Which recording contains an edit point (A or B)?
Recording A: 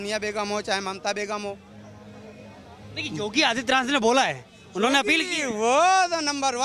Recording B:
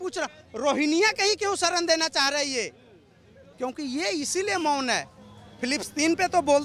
B